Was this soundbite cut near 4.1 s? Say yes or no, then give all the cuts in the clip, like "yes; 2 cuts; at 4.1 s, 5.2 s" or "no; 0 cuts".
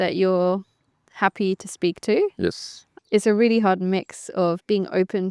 no; 1 cut; at 2.9 s